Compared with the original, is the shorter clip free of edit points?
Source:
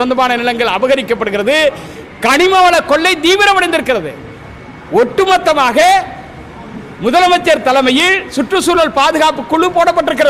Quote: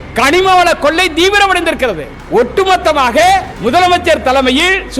no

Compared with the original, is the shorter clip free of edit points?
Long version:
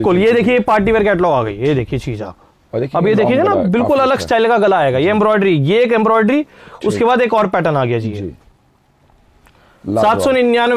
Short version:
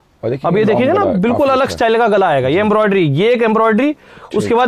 yes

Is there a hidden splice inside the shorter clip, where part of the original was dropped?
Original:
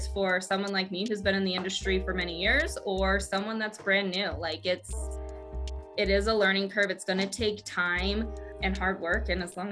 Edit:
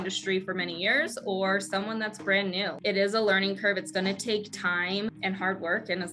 yes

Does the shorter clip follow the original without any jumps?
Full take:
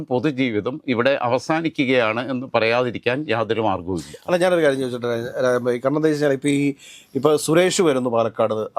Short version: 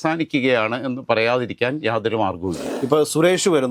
no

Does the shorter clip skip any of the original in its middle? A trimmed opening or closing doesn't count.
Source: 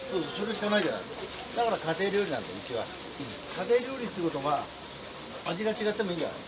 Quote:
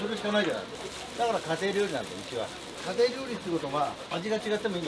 yes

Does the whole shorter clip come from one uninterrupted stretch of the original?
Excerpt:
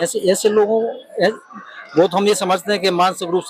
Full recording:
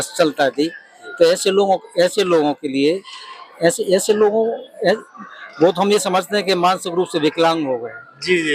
yes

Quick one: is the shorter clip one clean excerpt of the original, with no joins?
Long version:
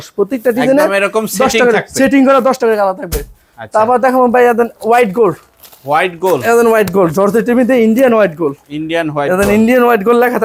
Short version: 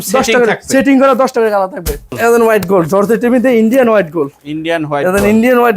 no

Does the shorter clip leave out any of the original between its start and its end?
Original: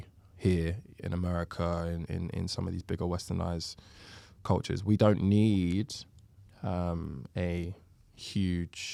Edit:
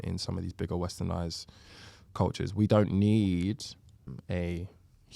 yes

